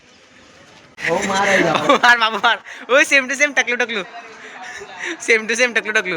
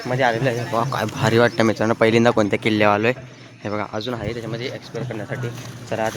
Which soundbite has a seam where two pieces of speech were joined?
first; 1 cut; at 1.0 s

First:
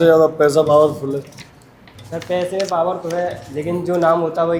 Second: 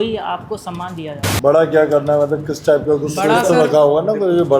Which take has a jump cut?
second; 1 cut; at 1.2 s

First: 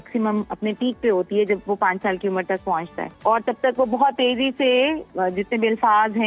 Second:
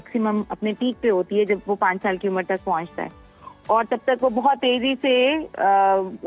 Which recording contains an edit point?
first; 2 cuts; at 3.0 s, 5.1 s

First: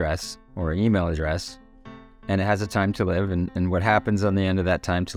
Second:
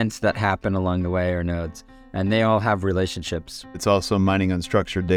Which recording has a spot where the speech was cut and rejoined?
second; 1 cut; at 3.8 s

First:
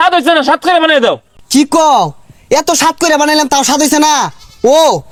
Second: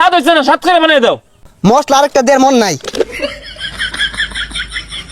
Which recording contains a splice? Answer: second; 2 cuts; at 1.4 s, 3.3 s

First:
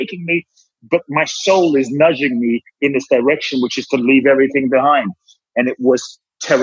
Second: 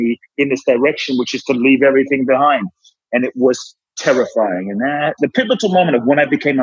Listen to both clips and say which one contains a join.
second; 1 cut; at 5.1 s

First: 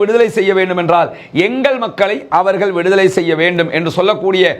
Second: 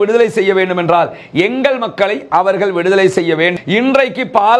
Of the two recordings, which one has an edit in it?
second; 1 cut; at 3.5 s

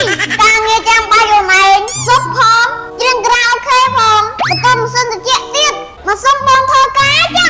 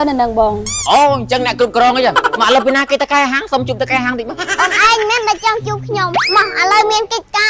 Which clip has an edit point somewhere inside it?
second; 3 cuts; at 2.3 s, 4.3 s, 6.2 s

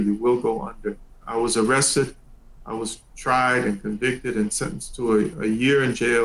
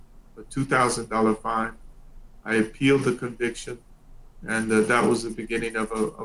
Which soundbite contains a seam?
first; 1 cut; at 1.2 s

